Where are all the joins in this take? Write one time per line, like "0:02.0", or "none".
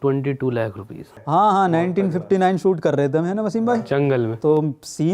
0:01.2